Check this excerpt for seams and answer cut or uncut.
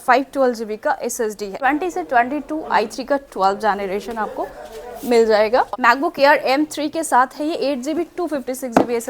cut